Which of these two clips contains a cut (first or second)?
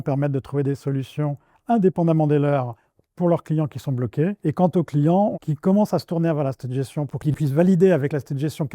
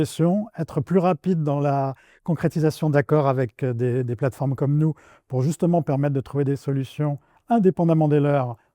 first